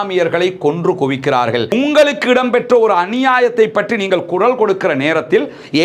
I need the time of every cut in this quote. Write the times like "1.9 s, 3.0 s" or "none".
1.7 s